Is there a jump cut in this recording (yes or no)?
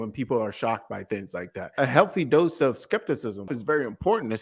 yes